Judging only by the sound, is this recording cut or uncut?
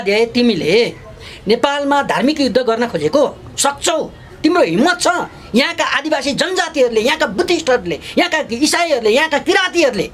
uncut